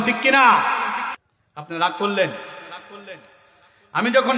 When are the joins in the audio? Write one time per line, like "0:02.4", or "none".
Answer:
0:01.1